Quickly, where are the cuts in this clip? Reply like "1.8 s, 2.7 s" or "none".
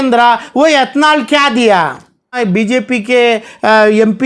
2.4 s